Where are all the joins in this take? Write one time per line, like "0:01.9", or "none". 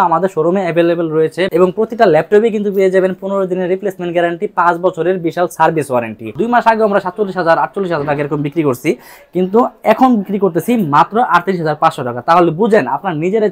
0:01.5
0:06.4